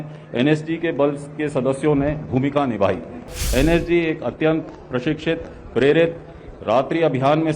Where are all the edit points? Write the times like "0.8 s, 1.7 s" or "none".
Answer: 3.4 s